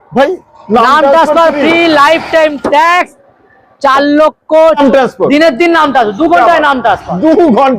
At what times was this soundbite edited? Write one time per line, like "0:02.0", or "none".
0:04.8